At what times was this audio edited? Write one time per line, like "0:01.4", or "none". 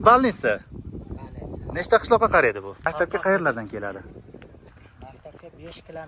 0:02.9